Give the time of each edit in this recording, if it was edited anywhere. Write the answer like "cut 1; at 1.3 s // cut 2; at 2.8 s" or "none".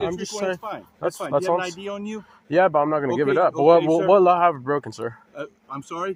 none